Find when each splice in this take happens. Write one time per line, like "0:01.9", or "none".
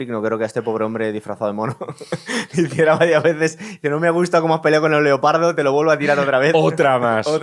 none